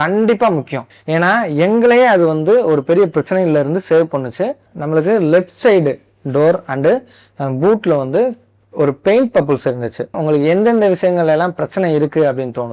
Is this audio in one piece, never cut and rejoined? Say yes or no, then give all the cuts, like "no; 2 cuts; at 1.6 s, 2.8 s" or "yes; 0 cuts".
no; 3 cuts; at 0.9 s, 4.7 s, 10.2 s